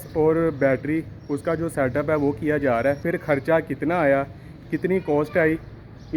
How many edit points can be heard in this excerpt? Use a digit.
1